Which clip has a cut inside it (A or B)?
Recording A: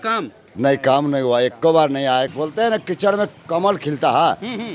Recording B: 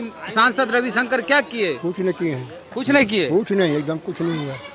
A